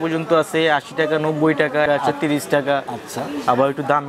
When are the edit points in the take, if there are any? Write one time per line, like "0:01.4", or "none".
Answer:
0:01.8